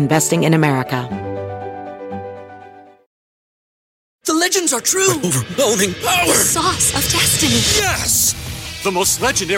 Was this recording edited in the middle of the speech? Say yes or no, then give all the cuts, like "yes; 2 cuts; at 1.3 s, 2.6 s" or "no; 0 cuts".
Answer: yes; 1 cut; at 1.0 s